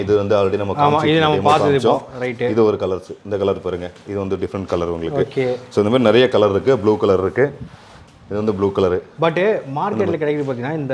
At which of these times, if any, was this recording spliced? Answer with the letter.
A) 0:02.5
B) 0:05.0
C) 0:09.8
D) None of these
D